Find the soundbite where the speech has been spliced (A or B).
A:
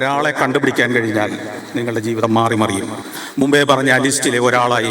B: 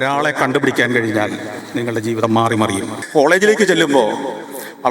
B